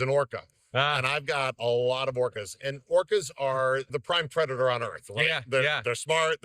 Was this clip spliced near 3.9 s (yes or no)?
yes